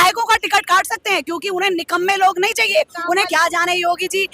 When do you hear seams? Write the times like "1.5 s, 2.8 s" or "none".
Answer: 3.3 s